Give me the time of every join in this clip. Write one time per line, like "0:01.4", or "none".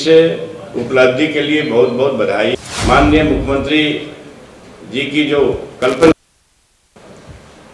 0:02.7